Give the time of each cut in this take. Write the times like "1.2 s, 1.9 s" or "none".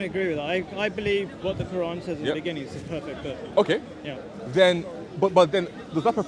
none